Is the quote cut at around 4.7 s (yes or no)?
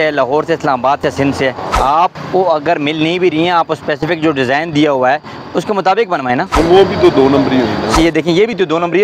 no